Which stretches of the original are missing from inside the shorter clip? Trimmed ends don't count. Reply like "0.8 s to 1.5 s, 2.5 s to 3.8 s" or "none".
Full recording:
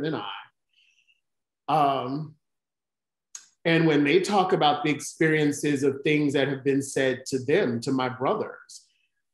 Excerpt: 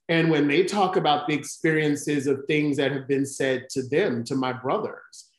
none